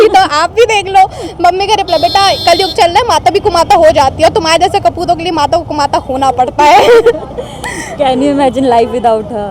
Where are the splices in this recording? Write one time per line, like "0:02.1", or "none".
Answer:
none

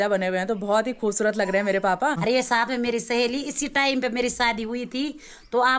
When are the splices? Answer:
0:02.2

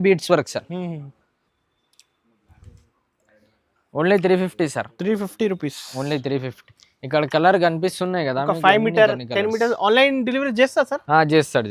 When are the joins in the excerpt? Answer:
none

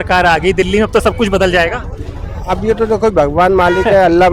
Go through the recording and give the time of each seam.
none

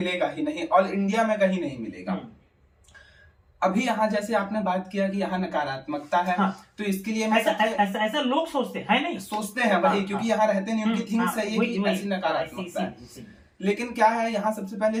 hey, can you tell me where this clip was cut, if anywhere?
none

